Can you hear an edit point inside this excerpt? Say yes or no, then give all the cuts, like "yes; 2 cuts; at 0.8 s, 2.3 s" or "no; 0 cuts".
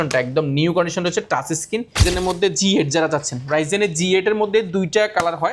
yes; 1 cut; at 2.0 s